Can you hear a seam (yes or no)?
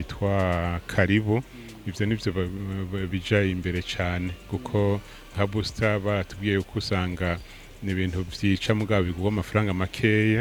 no